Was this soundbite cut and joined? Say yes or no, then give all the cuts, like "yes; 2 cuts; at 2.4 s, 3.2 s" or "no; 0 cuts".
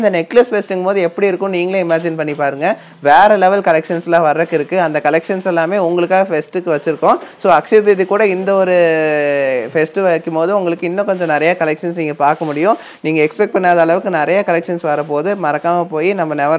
no; 0 cuts